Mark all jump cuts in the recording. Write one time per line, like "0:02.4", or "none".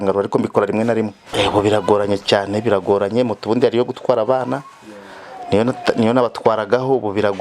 0:01.2